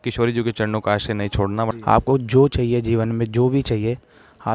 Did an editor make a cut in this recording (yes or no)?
yes